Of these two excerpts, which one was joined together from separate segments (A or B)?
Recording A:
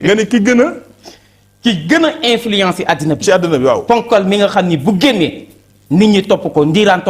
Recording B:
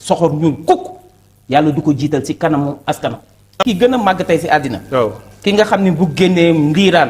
B